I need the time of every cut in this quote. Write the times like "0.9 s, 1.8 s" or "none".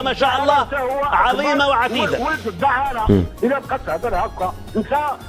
none